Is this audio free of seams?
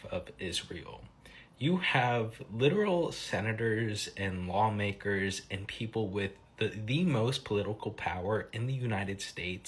yes; 0 cuts

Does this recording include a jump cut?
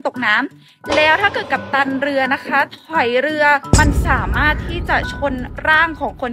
yes; 1 cut; at 3.7 s

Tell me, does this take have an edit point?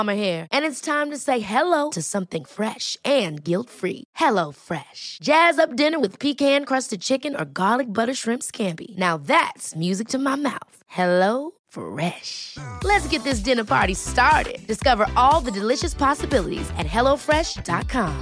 no; 0 cuts

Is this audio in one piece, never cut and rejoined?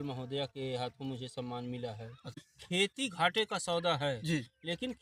no; 1 cut; at 2.5 s

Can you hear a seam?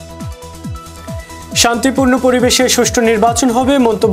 yes; 1 cut; at 1.6 s

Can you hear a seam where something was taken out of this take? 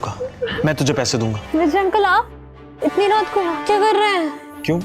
yes; 1 cut; at 1.4 s

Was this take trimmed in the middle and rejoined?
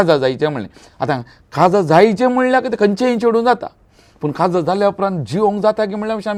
no; 0 cuts

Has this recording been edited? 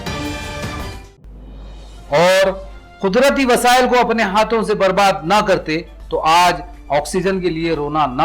yes; 1 cut; at 1.0 s

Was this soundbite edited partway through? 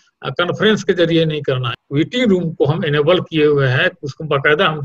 yes; 1 cut; at 1.7 s

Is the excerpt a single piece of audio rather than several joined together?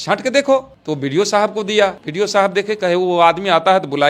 no; 1 cut; at 2.0 s

